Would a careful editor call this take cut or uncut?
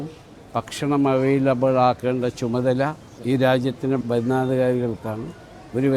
cut